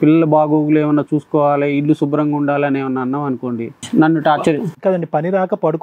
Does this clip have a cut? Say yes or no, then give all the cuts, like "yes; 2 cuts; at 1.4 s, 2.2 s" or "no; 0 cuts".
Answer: yes; 1 cut; at 3.8 s